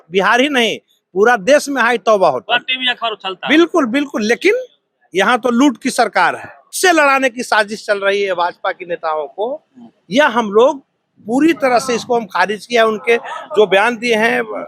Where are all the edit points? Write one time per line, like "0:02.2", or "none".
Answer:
0:06.8